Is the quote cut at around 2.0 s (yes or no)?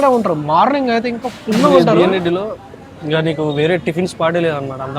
yes